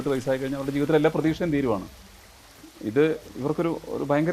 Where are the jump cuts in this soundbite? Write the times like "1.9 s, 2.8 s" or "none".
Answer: none